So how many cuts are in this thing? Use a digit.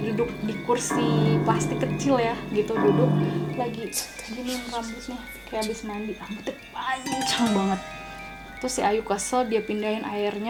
0